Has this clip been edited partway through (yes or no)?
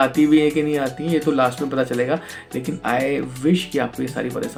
no